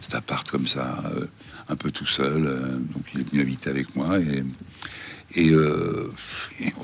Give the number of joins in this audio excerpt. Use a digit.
0